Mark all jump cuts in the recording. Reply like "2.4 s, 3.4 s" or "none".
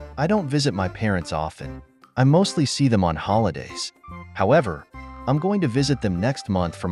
none